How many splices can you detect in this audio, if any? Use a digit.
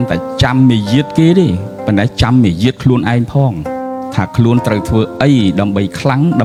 0